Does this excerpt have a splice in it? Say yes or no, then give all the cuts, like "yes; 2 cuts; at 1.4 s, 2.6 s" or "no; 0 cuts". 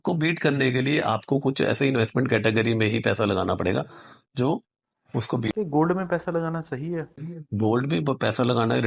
no; 0 cuts